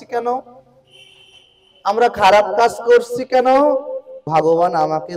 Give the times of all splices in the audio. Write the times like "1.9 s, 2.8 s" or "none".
4.2 s